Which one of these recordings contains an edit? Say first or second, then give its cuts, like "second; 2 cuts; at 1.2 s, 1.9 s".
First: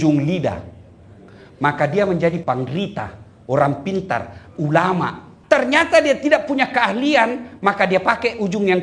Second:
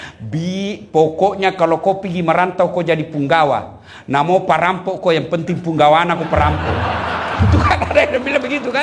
first; 2 cuts; at 2.4 s, 5.3 s